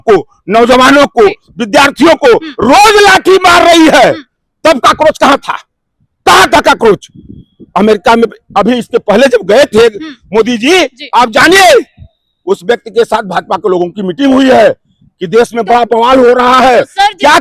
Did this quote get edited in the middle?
no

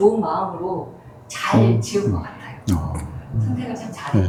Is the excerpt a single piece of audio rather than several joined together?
yes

